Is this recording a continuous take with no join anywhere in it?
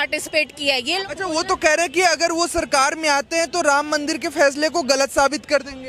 no; 1 cut; at 0.9 s

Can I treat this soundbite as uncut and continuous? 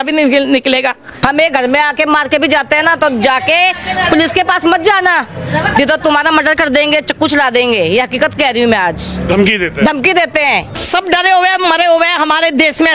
no; 2 cuts; at 1.1 s, 10.8 s

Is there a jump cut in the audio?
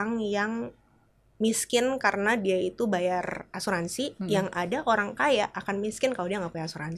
no; 0 cuts

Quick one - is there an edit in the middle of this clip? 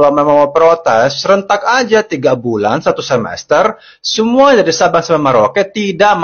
no; 0 cuts

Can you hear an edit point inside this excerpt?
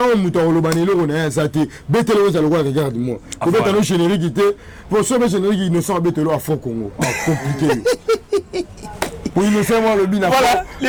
no; 0 cuts

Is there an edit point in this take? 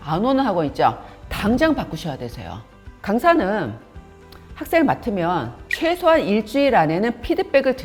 no; 0 cuts

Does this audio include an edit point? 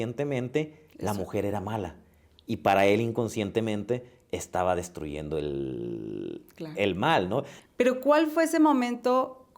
yes; 1 cut; at 7.6 s

